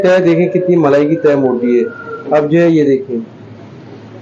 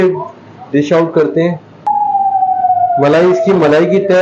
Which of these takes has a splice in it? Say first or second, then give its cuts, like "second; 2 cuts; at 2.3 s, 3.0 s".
second; 1 cut; at 1.8 s